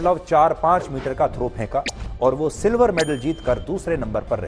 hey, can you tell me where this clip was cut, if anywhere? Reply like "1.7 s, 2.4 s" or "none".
none